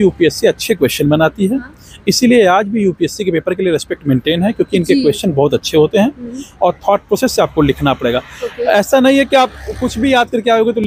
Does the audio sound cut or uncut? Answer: uncut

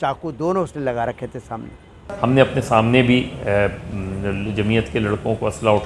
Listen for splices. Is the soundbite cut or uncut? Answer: cut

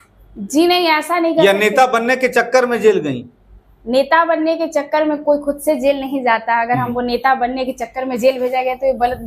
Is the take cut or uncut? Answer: uncut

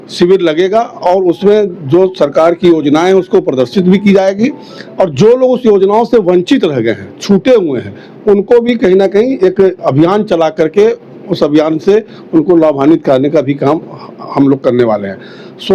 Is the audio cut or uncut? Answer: uncut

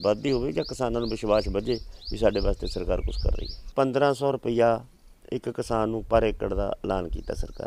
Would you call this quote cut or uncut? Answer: cut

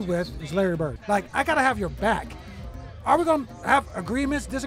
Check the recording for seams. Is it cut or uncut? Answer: cut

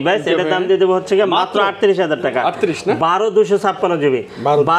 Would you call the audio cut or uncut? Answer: uncut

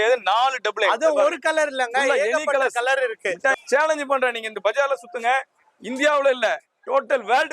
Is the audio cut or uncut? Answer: cut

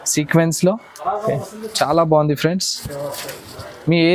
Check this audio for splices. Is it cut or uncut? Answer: uncut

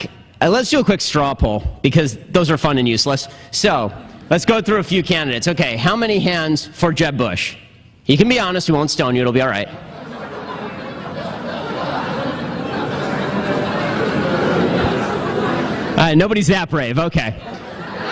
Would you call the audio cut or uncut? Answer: uncut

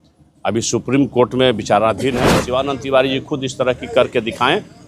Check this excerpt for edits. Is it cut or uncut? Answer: cut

